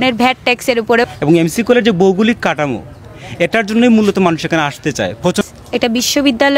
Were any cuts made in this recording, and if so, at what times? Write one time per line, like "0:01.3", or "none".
0:01.1
0:05.4